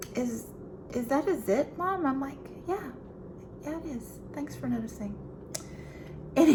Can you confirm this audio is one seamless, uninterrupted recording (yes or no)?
yes